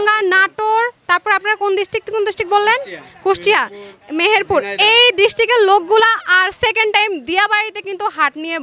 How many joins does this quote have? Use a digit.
0